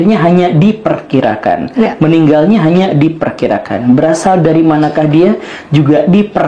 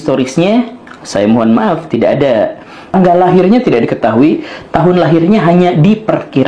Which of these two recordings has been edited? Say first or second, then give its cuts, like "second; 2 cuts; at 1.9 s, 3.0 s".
second; 1 cut; at 2.9 s